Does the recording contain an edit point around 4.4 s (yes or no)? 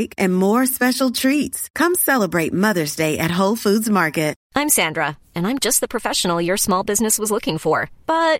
yes